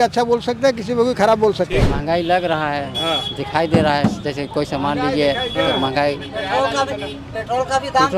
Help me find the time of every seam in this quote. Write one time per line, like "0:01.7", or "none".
0:01.9